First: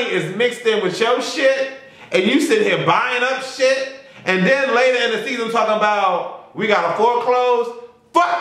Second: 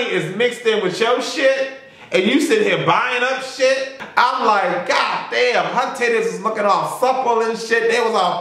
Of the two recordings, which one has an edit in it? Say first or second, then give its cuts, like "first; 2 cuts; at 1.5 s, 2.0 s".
second; 1 cut; at 4.0 s